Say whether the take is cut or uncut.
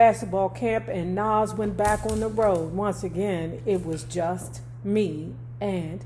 uncut